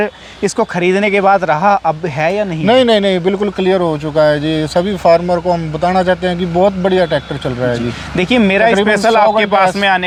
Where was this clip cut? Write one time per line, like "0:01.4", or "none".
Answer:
none